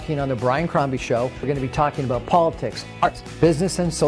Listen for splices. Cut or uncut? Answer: cut